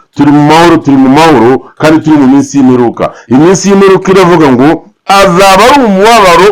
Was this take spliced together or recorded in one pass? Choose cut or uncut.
uncut